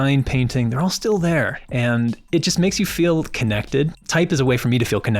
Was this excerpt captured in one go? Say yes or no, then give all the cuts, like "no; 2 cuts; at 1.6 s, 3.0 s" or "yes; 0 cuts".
no; 2 cuts; at 1.6 s, 4.1 s